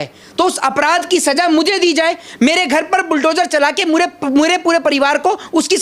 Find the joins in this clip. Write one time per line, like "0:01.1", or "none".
none